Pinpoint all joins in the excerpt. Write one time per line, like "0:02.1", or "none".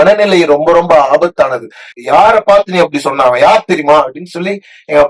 0:02.0